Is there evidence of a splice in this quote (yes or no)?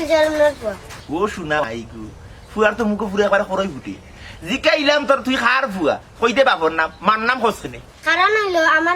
yes